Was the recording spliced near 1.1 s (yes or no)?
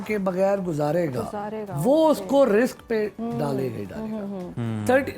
no